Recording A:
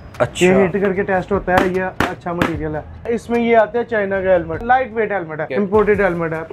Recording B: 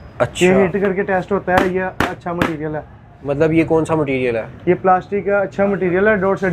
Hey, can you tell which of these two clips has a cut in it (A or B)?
A